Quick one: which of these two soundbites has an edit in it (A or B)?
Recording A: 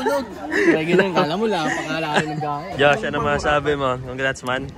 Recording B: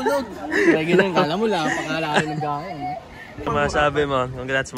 A